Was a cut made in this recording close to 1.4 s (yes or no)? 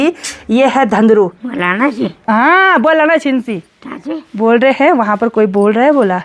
yes